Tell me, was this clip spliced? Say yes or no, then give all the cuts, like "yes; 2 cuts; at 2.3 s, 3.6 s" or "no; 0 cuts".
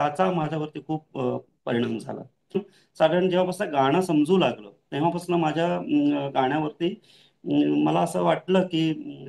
yes; 1 cut; at 2.6 s